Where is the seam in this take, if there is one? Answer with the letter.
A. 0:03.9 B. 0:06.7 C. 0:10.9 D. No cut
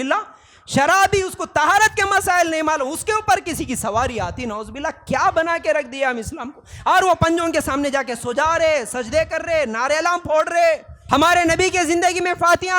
C